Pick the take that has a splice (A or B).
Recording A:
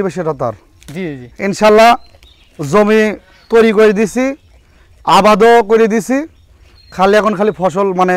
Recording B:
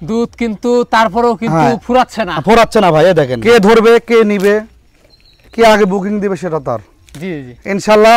B